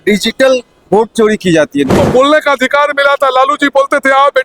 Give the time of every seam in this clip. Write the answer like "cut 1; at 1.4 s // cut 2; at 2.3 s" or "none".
cut 1; at 1.9 s